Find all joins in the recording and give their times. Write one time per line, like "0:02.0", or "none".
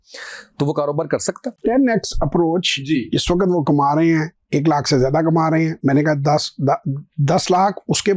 0:01.5